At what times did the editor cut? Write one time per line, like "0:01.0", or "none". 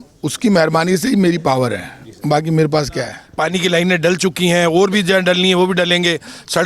0:03.2